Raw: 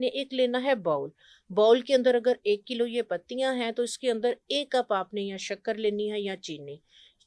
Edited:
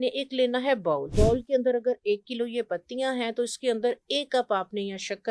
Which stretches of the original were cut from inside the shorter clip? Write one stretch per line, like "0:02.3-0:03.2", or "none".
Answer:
0:01.1-0:01.5

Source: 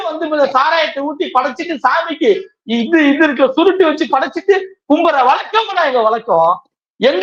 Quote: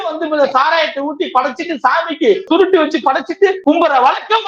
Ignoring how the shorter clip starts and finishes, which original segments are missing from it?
0:02.5-0:03.5
0:04.6-0:04.8

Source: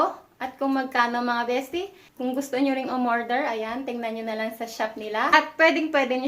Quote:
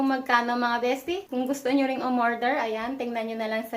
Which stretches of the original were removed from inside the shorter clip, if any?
0:01.9-0:02.1

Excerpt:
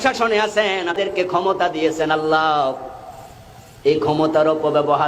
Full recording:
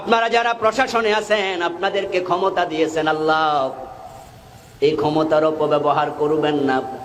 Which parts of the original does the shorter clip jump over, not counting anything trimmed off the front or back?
0:01.7-0:01.9

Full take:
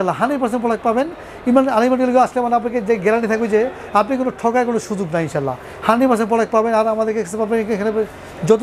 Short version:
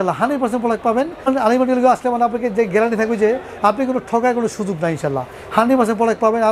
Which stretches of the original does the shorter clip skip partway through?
0:01.3-0:01.6

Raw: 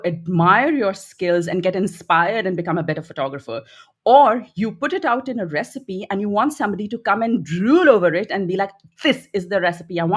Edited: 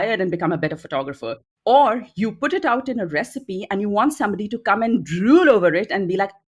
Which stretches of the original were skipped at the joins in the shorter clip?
0:03.7-0:03.9

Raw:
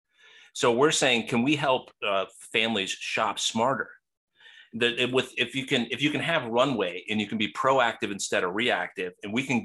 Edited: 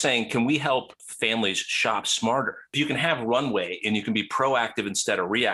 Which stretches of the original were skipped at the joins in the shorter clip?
0:02.0-0:02.3
0:04.0-0:05.9

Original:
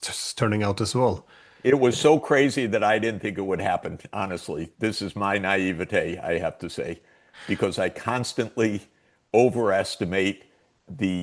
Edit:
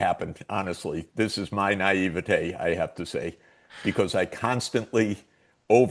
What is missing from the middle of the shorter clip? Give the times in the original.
none

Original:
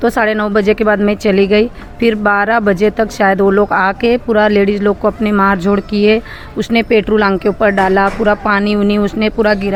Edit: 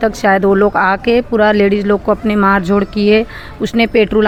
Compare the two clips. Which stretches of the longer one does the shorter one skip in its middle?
none

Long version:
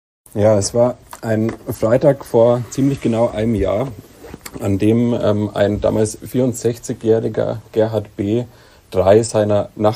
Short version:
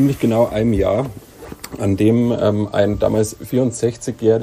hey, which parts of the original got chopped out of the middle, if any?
none

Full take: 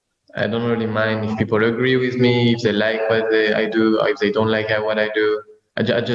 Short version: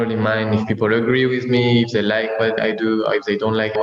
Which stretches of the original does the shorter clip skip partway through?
0:03.3-0:03.5

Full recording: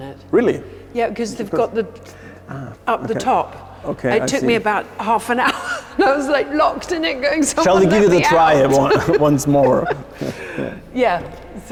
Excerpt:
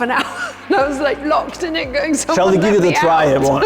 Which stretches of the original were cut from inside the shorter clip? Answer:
none

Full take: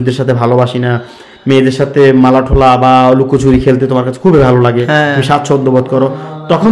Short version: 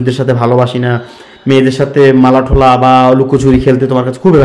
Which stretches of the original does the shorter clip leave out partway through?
none

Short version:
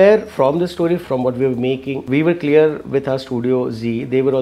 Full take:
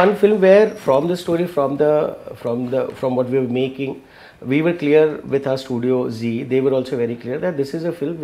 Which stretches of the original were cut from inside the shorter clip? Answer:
0:01.5-0:02.9
0:03.9-0:04.4

